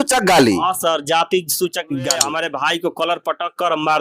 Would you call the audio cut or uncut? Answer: cut